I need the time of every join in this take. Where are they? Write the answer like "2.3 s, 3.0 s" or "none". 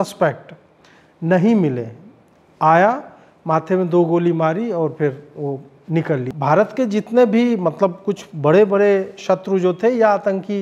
6.3 s